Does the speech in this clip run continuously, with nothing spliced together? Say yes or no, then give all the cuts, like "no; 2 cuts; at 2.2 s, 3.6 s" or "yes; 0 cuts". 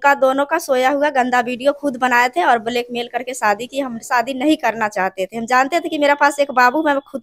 yes; 0 cuts